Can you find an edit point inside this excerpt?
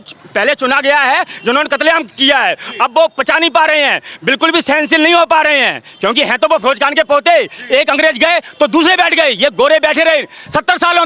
no; 0 cuts

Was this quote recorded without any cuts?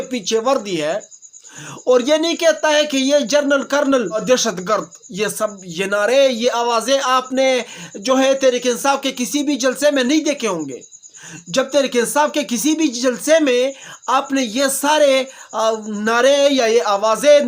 no; 1 cut; at 4.2 s

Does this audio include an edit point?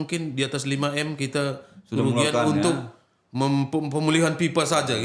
no; 0 cuts

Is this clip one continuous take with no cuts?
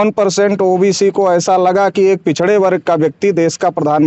yes; 0 cuts

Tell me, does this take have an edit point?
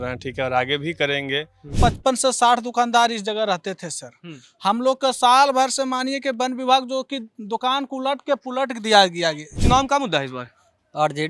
yes; 2 cuts; at 1.7 s, 9.5 s

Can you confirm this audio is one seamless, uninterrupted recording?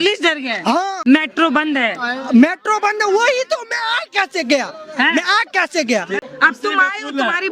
no; 2 cuts; at 1.0 s, 6.2 s

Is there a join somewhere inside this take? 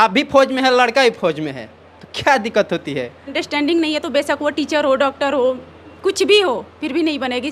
yes; 1 cut; at 3.4 s

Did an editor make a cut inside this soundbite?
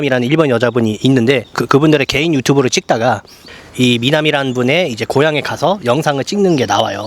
yes; 2 cuts; at 1.5 s, 3.5 s

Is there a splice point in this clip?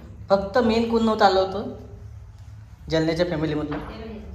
no; 0 cuts

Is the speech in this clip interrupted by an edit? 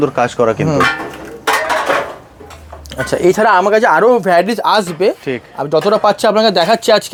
no; 0 cuts

